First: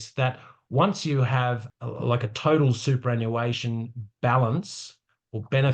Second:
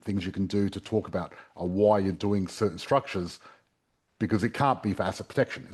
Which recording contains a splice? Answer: first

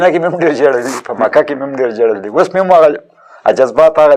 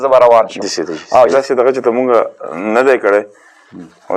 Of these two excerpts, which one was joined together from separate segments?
second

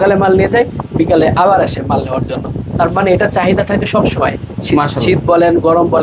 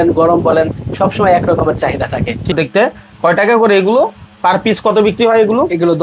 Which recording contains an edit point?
second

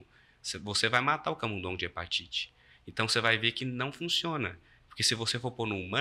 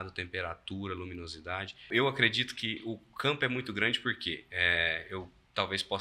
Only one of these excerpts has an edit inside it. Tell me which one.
second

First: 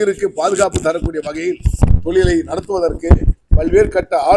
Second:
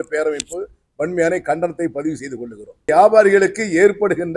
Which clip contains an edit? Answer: second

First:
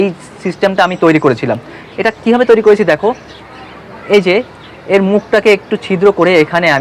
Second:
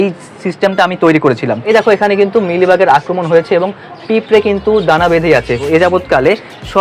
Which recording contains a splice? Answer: second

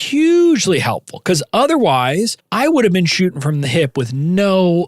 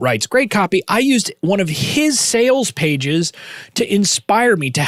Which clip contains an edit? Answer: first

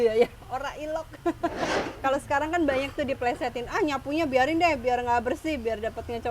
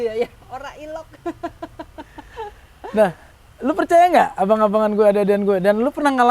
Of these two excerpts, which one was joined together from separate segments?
first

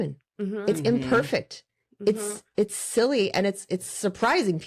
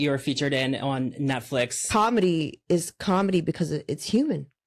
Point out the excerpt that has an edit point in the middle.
second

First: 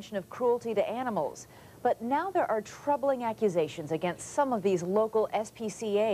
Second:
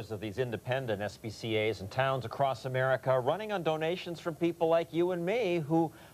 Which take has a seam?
second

